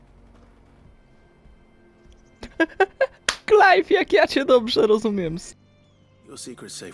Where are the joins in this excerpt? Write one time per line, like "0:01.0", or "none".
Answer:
0:05.4